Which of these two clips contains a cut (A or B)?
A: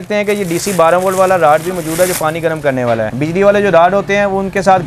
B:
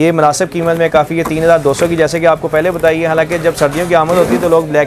A